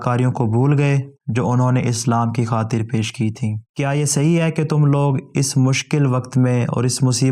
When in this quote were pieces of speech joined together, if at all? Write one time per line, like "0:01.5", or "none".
0:03.6